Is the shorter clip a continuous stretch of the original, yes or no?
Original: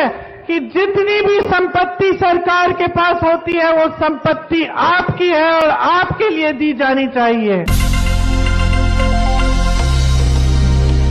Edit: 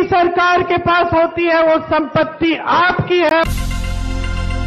no